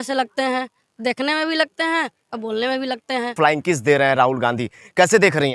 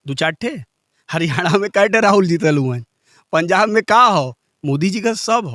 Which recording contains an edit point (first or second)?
first